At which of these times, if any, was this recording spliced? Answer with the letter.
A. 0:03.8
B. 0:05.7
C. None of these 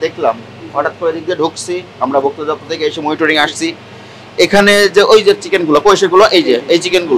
C